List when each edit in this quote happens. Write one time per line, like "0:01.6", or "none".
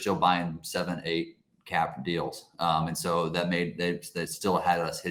none